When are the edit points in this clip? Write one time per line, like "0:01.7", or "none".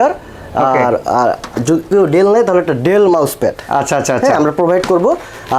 none